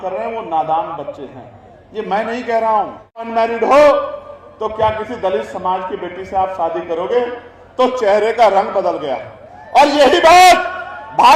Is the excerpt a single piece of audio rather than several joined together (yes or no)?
no